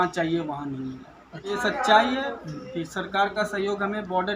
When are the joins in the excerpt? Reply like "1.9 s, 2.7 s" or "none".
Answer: 1.5 s